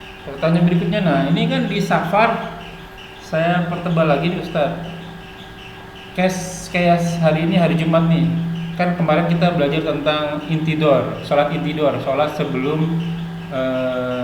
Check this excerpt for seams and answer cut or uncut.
uncut